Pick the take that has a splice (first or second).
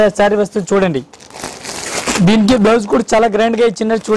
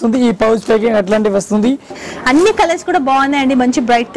second